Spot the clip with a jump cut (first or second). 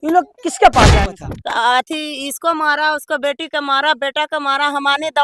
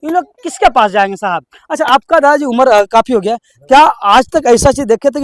first